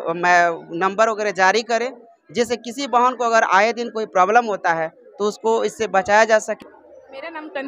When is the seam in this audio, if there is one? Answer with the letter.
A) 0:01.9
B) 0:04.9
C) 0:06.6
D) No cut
C